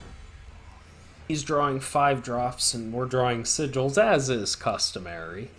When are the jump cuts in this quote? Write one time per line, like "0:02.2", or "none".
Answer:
0:01.3